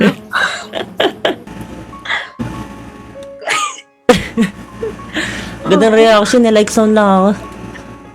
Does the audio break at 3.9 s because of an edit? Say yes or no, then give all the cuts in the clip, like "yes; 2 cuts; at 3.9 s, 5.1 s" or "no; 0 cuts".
no; 1 cut; at 1.4 s